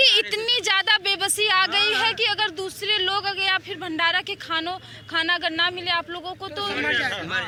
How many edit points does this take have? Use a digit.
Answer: 0